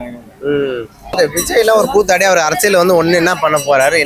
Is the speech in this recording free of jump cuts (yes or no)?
no